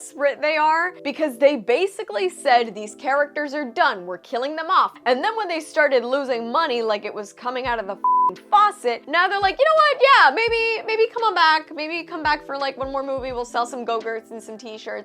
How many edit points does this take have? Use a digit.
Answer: 3